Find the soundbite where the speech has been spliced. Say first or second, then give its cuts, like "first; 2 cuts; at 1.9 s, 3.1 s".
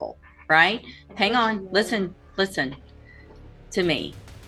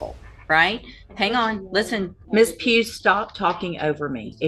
second; 1 cut; at 2.2 s